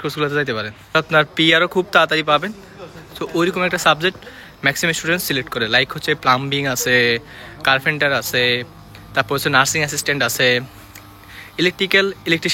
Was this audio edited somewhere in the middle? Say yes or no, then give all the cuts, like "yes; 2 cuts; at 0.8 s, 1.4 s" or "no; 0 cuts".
yes; 1 cut; at 0.9 s